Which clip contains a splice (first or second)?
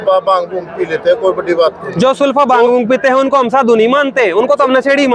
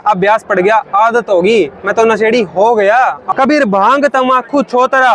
second